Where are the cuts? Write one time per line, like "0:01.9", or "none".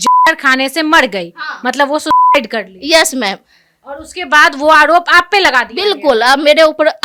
none

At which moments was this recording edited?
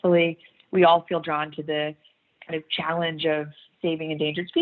none

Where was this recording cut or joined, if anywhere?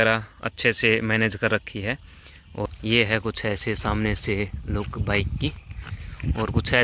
0:02.6

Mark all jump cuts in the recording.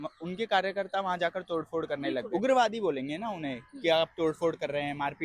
0:02.3

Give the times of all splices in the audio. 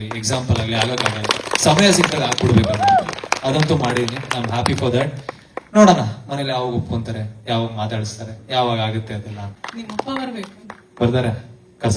0:10.1

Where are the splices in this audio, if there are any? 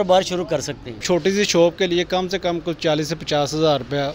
0:01.0

